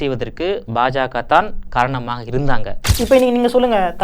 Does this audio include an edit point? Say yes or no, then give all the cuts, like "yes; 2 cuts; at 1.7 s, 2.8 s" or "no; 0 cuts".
yes; 1 cut; at 3.0 s